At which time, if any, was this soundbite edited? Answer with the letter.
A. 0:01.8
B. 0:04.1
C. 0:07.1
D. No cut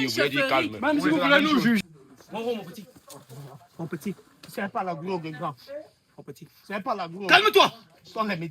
A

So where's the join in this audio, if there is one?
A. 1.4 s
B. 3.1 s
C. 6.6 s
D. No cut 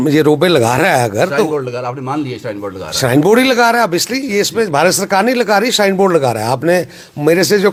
D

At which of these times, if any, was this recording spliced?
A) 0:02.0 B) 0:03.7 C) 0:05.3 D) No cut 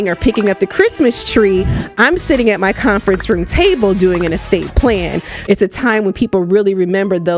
C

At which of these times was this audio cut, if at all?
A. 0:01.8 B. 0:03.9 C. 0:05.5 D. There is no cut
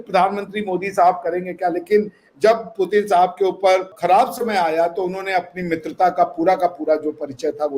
B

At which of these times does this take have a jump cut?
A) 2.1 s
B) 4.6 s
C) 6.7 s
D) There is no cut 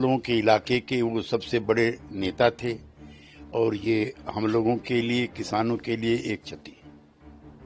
C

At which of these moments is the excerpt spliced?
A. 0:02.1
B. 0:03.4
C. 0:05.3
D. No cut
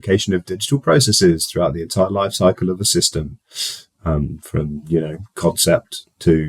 D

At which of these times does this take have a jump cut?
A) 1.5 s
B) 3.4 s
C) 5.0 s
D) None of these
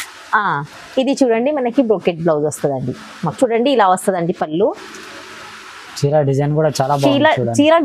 B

